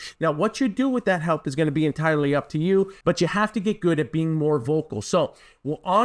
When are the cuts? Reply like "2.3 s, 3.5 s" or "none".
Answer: 2.9 s